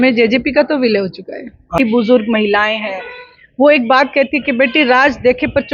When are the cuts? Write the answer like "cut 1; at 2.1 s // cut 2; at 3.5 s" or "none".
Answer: cut 1; at 1.8 s